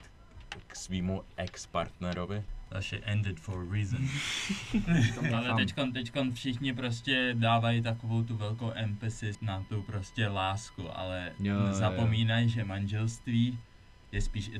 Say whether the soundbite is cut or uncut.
cut